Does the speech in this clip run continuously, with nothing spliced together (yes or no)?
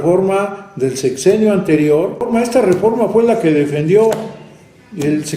no